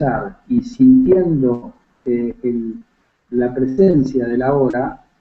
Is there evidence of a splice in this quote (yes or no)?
yes